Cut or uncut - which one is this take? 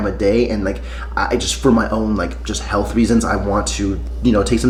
uncut